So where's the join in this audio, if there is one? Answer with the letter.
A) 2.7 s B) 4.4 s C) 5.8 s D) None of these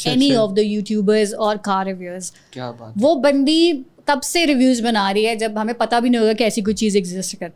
D